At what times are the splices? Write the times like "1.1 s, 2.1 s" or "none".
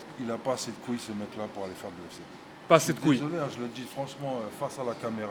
none